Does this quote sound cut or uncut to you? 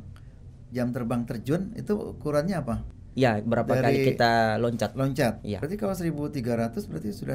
cut